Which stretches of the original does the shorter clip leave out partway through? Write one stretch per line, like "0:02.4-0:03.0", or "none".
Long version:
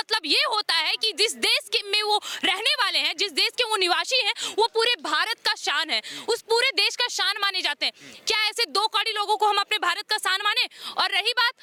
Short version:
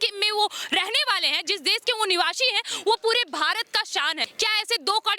0:06.0-0:08.1